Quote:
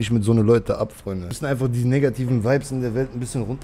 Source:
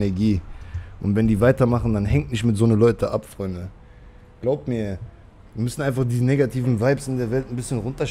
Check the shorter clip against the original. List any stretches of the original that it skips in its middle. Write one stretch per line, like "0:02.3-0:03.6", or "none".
0:03.7-0:05.7